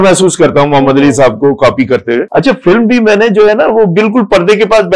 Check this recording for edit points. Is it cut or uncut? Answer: cut